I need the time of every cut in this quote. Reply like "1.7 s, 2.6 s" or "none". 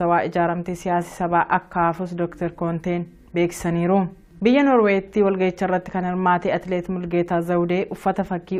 none